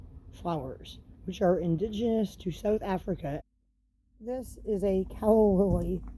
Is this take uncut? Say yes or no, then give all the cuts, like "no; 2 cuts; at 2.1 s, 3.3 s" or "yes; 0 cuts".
no; 1 cut; at 3.4 s